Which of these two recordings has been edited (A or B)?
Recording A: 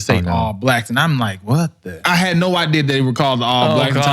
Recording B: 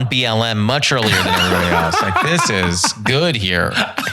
A